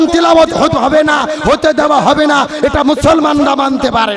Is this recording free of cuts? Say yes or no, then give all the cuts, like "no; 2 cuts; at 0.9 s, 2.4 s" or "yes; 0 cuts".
yes; 0 cuts